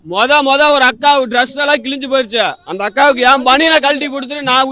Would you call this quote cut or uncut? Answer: uncut